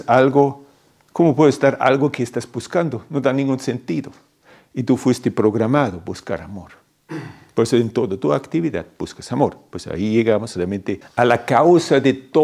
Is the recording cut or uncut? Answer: cut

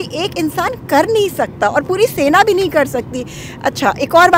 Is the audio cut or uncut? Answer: uncut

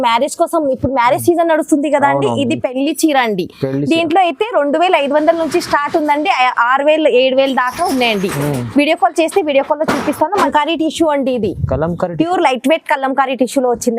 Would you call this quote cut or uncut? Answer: cut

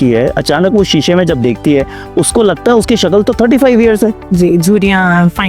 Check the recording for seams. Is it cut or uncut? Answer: uncut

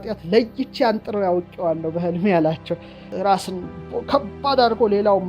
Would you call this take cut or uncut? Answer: cut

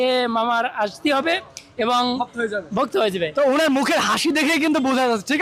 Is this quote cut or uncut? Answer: uncut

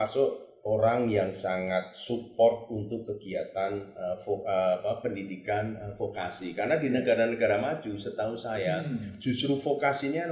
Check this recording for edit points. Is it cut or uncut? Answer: uncut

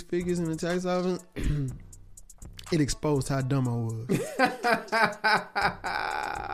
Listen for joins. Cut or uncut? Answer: uncut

